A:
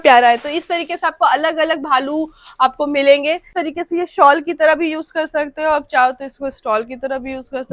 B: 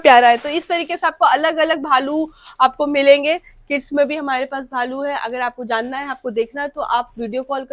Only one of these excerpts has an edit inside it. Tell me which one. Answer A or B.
A